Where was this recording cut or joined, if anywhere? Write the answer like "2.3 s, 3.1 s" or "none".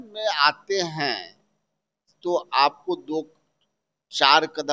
none

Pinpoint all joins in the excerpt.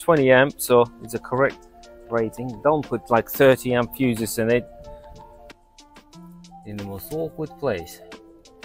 5.6 s

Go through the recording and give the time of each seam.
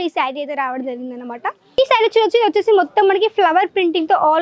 1.8 s

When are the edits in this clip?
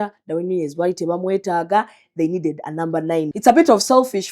3.3 s

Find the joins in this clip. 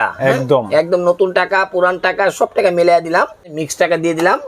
3.5 s

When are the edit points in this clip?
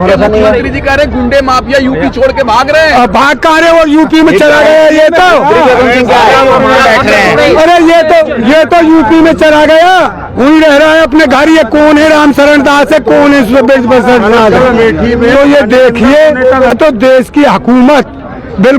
16.7 s

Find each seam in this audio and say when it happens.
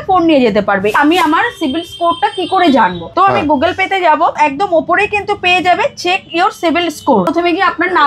0.9 s, 3.0 s, 4.4 s, 7.3 s

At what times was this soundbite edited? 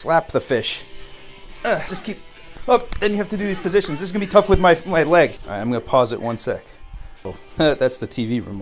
1.9 s, 5.4 s, 7.4 s

